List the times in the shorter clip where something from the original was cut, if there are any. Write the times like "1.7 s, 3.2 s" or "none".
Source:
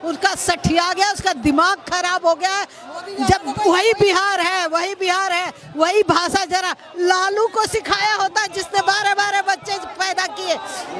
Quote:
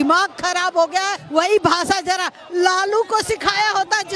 1.2 s